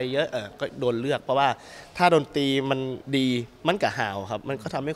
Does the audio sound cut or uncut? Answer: uncut